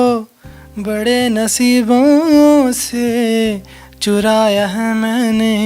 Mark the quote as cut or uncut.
uncut